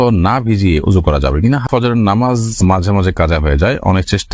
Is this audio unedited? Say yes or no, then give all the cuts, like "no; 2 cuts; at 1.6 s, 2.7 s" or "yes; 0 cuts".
no; 1 cut; at 1.7 s